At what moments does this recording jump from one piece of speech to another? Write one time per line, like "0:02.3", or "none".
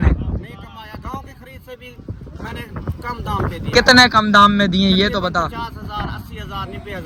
none